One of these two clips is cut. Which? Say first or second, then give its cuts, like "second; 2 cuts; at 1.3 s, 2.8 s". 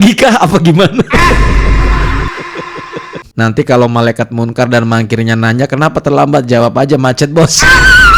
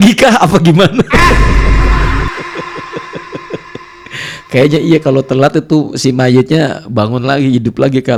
first; 1 cut; at 3.2 s